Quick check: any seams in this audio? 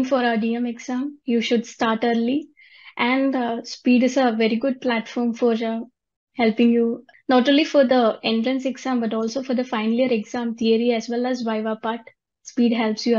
no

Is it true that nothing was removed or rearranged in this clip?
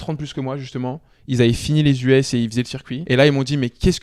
no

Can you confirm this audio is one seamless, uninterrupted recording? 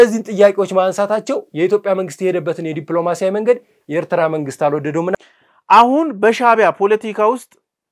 no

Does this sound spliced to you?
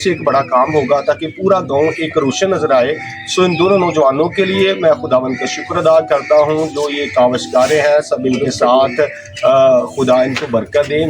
yes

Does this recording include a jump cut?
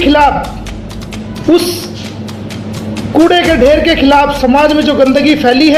yes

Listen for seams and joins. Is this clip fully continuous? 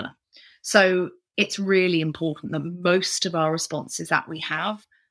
no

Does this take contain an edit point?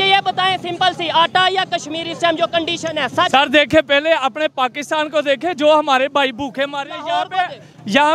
no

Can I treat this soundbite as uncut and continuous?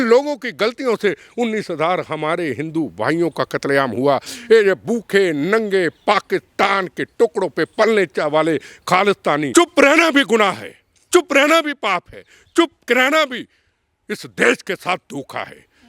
no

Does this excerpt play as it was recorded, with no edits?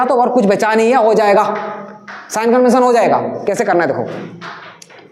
yes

